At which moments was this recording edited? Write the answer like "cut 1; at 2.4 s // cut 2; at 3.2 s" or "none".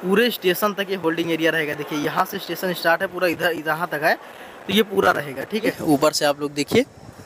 cut 1; at 5.7 s